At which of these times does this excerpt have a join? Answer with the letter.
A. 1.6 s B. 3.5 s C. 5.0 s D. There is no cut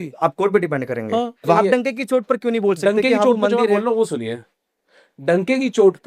A